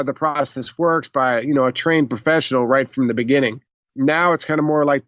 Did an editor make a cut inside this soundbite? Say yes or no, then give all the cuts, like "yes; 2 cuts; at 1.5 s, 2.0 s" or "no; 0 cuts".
no; 0 cuts